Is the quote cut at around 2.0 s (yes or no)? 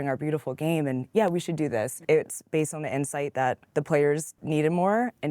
yes